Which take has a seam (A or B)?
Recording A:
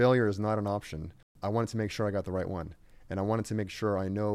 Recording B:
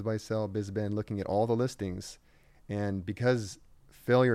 A